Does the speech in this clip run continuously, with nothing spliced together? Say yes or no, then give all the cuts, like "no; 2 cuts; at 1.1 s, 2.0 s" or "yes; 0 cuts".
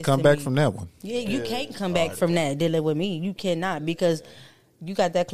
yes; 0 cuts